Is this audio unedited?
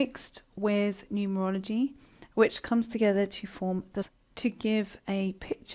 yes; 0 cuts

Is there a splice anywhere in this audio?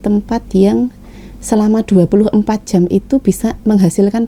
no; 0 cuts

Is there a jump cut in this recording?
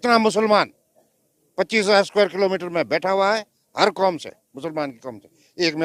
no; 0 cuts

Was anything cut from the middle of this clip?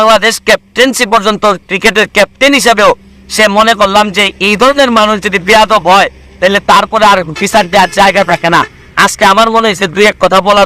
no; 0 cuts

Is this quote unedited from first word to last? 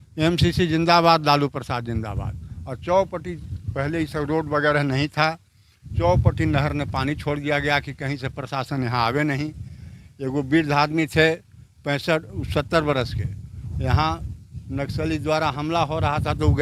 yes; 0 cuts

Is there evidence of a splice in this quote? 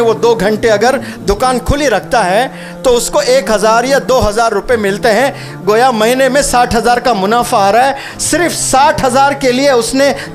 no; 0 cuts

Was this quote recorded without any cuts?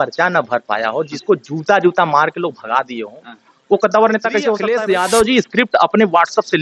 no; 1 cut; at 4.6 s

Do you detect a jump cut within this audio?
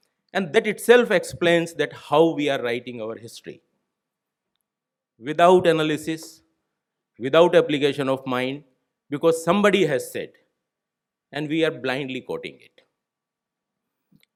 no; 0 cuts

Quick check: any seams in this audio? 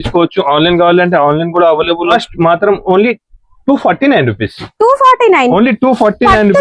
yes; 1 cut; at 2.1 s

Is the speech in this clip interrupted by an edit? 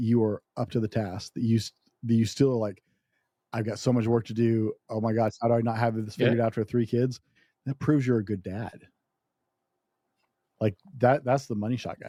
no; 0 cuts

